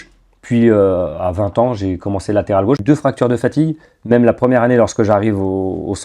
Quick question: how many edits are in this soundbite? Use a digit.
1